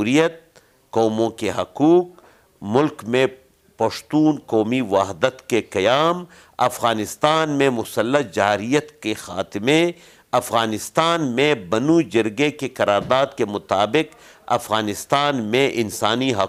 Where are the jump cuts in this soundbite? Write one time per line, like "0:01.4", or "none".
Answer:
none